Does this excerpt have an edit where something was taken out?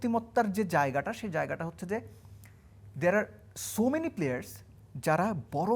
no; 0 cuts

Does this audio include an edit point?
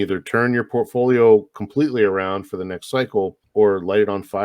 yes; 1 cut; at 3.4 s

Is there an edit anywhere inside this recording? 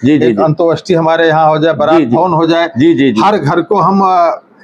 no; 0 cuts

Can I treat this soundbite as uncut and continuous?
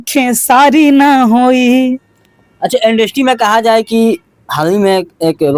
yes; 0 cuts

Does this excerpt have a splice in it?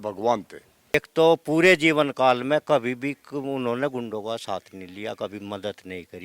yes; 1 cut; at 0.9 s

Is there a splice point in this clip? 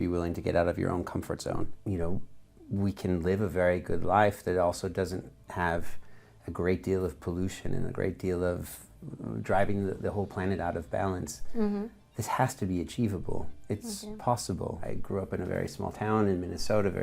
yes; 2 cuts; at 1.7 s, 14.8 s

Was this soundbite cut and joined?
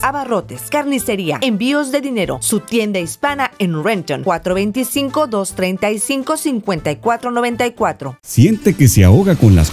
yes; 1 cut; at 8.1 s

